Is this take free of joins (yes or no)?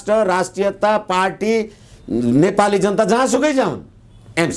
yes